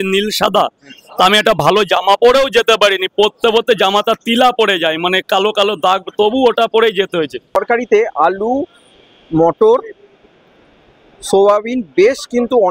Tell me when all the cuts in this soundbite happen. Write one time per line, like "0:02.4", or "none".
0:07.6